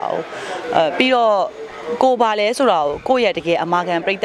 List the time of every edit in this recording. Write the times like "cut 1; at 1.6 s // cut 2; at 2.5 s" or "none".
none